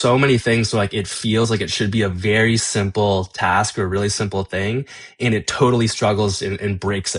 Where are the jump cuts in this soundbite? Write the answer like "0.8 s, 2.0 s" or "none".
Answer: none